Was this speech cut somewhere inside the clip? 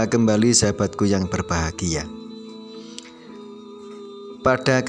yes; 2 cuts; at 2.0 s, 4.2 s

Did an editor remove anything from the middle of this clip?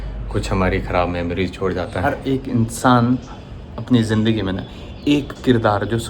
yes; 1 cut; at 2.0 s

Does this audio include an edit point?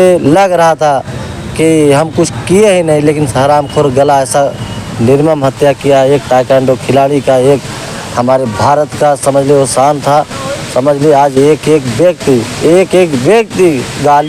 no; 0 cuts

